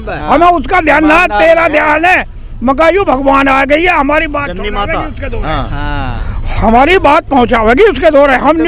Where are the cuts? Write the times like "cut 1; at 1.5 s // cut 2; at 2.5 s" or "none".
none